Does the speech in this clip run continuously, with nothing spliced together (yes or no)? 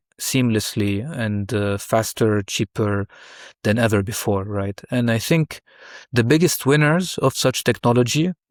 yes